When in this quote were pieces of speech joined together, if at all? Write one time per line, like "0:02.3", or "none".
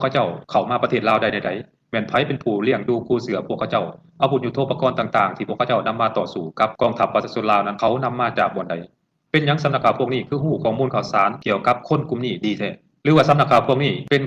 none